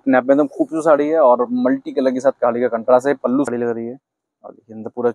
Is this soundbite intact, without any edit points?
no; 1 cut; at 3.5 s

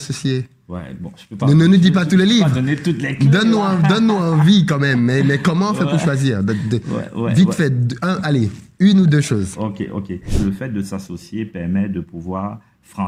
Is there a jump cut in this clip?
yes; 1 cut; at 10.3 s

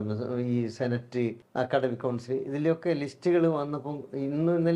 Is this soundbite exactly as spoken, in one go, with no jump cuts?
no; 1 cut; at 1.4 s

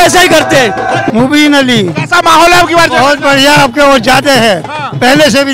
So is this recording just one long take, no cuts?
yes; 0 cuts

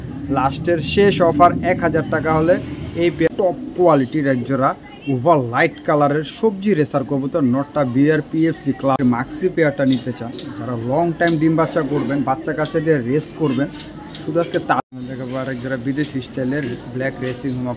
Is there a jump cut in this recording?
yes; 3 cuts; at 3.3 s, 9.0 s, 14.8 s

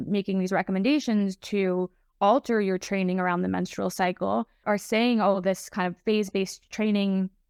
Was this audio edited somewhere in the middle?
no; 0 cuts

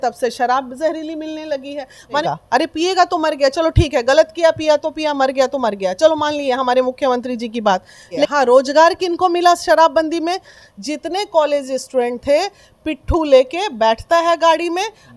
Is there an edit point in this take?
yes; 2 cuts; at 2.2 s, 8.3 s

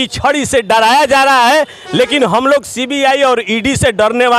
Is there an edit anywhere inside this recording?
no; 0 cuts

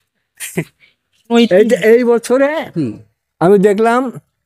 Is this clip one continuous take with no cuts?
no; 1 cut; at 1.2 s

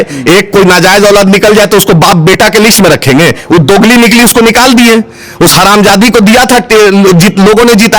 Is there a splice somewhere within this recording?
no; 0 cuts

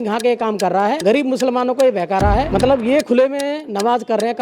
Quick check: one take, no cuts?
no; 2 cuts; at 1.0 s, 2.5 s

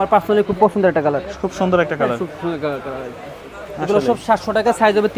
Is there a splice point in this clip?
no; 0 cuts

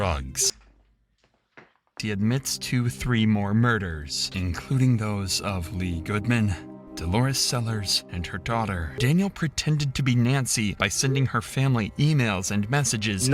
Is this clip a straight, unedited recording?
no; 2 cuts; at 1.9 s, 8.9 s

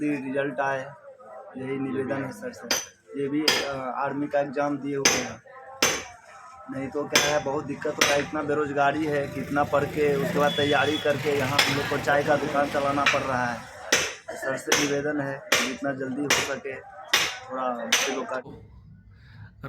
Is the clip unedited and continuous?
no; 1 cut; at 18.5 s

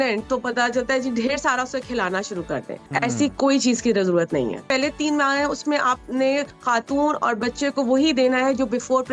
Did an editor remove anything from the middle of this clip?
yes; 3 cuts; at 2.8 s, 4.7 s, 6.5 s

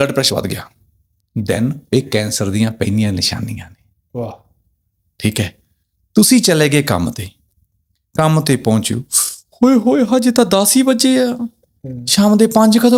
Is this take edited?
no; 0 cuts

